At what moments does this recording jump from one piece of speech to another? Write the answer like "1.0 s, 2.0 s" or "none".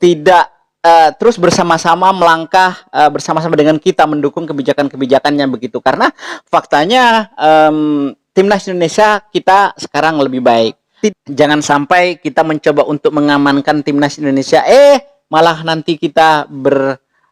11.1 s